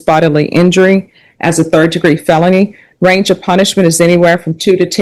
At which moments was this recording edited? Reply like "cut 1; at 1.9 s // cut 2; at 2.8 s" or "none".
none